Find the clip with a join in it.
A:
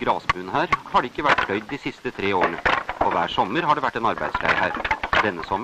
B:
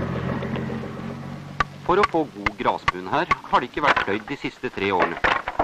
B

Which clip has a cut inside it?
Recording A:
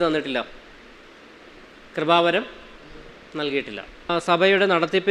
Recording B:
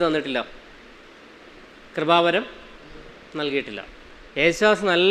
A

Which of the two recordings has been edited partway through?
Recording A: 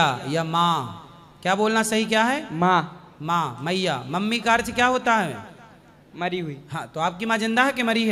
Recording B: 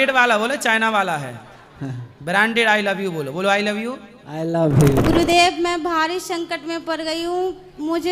B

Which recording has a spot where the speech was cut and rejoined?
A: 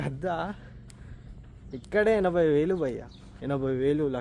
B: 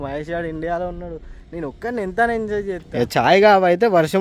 B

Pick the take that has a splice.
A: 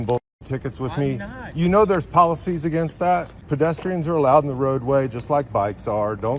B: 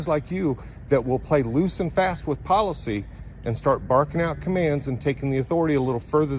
A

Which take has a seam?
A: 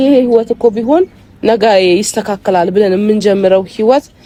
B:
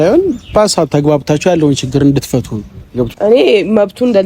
B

